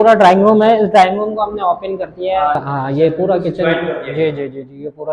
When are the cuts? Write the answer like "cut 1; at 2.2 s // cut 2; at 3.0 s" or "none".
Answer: cut 1; at 2.6 s